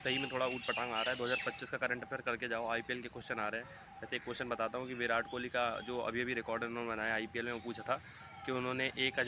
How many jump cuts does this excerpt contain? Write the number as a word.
zero